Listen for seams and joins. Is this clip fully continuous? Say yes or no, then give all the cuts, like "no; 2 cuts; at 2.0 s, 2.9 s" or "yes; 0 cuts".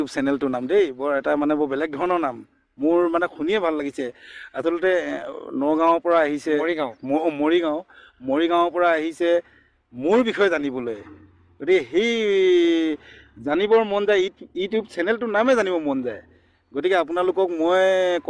yes; 0 cuts